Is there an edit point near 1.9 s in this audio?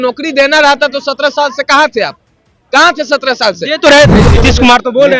no; 1 cut; at 4.2 s

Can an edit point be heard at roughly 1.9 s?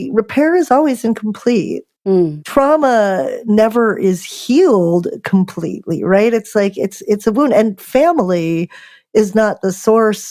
yes; 1 cut; at 1.9 s

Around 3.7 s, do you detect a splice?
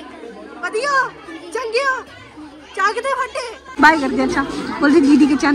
yes; 1 cut; at 3.7 s

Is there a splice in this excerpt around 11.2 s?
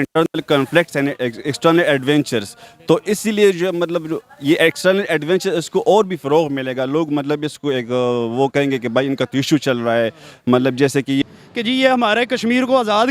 yes; 1 cut; at 11.2 s

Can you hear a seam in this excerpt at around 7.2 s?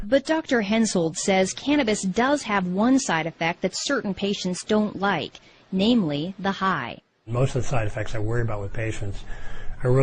no; 0 cuts

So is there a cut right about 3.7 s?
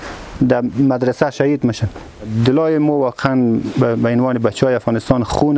no; 1 cut; at 2.3 s

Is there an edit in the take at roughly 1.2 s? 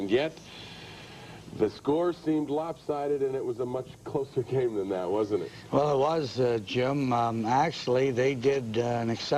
no; 1 cut; at 3.0 s

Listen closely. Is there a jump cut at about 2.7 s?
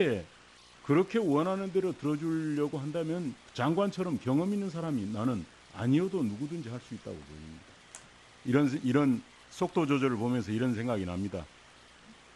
no; 0 cuts

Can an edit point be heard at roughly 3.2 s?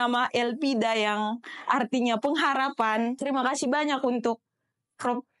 yes; 1 cut; at 3.2 s

